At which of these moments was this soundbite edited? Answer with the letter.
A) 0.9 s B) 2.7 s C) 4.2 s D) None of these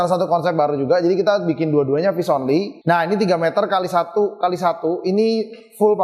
B